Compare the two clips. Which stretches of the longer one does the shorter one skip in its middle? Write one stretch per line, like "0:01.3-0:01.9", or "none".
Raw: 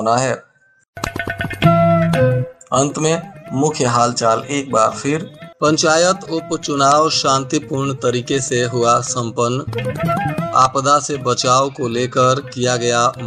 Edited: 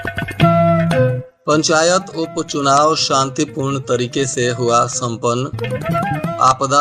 0:02.5-0:05.4